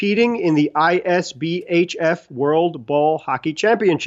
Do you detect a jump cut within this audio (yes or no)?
no